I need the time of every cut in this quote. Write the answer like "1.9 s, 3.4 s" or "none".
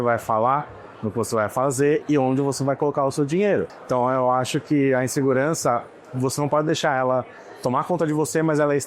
3.8 s